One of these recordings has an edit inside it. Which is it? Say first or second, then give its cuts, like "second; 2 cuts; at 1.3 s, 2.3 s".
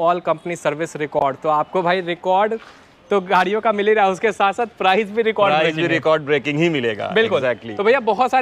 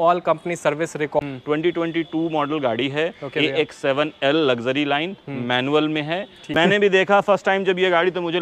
second; 2 cuts; at 1.2 s, 6.4 s